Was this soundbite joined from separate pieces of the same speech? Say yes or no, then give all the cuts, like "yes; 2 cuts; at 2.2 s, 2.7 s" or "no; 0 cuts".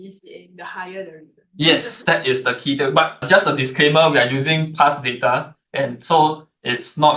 yes; 1 cut; at 1.9 s